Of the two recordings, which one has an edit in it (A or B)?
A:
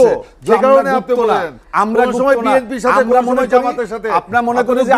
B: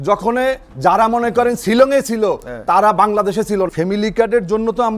B